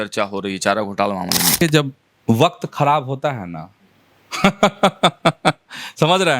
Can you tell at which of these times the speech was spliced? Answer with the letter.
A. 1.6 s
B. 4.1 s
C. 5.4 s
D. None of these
A